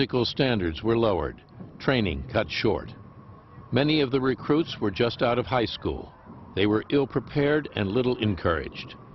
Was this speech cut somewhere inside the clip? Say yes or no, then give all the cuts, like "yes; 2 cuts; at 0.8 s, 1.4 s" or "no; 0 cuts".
yes; 1 cut; at 3.6 s